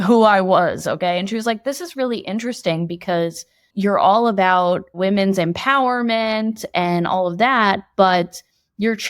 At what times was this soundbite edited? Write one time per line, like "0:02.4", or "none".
0:03.6
0:05.0